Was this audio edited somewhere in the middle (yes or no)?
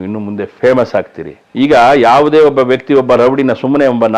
no